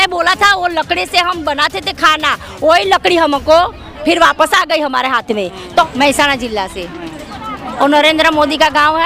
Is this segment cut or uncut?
cut